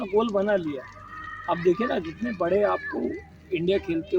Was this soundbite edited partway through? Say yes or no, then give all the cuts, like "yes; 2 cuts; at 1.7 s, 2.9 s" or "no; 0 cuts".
no; 0 cuts